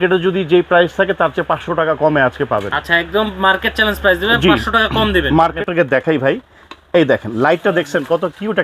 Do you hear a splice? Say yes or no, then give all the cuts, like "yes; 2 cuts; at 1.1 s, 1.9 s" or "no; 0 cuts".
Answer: yes; 1 cut; at 5.6 s